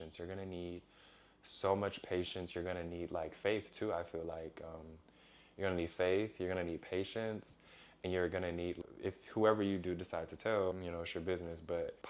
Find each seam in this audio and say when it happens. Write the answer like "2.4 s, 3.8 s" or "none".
none